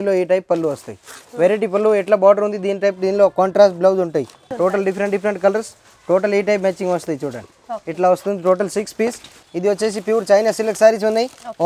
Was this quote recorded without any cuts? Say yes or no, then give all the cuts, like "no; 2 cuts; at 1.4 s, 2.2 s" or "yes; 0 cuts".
no; 2 cuts; at 4.5 s, 9.3 s